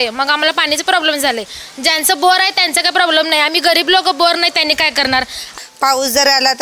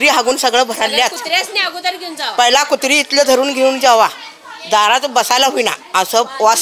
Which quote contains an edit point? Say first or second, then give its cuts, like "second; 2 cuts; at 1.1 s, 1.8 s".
first; 1 cut; at 5.6 s